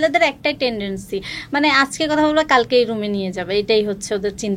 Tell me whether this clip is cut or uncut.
uncut